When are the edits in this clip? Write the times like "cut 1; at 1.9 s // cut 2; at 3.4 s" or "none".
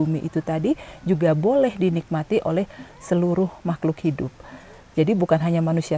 none